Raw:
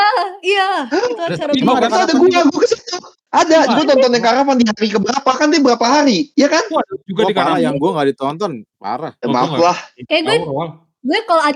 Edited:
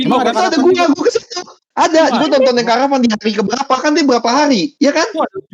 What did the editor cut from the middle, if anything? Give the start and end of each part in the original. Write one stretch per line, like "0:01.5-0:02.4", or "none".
none